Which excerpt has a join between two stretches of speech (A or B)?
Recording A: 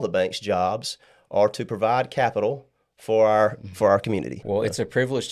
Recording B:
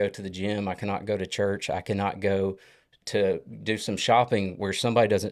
A